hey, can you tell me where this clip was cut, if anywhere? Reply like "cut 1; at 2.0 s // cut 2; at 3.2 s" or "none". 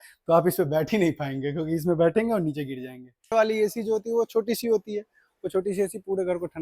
cut 1; at 3.3 s